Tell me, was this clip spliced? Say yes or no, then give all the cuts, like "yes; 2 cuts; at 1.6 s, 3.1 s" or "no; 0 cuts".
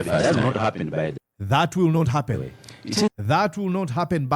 yes; 1 cut; at 1.1 s